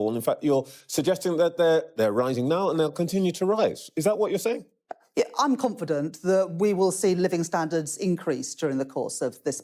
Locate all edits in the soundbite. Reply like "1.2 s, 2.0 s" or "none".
8.7 s

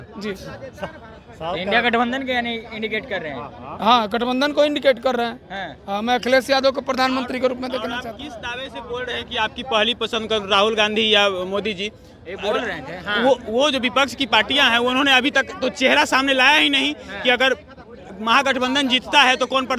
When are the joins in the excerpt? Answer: none

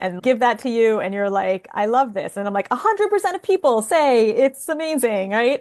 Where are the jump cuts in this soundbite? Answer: none

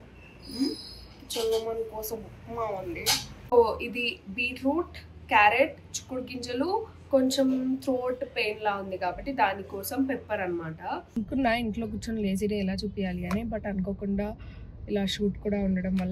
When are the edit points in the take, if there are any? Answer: 3.3 s, 11.2 s

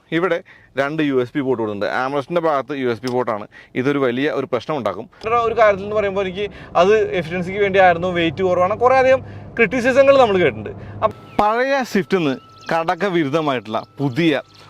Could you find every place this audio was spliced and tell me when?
5.2 s, 11.1 s

